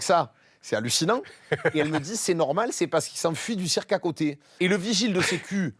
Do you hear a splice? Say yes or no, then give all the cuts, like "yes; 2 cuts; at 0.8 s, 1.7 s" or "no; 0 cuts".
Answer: yes; 1 cut; at 4.5 s